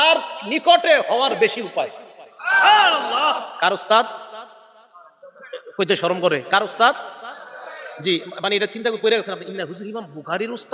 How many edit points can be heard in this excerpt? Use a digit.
0